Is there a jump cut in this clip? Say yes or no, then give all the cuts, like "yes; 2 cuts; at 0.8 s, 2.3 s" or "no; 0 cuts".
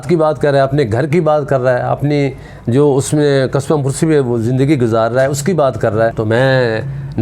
yes; 1 cut; at 6.2 s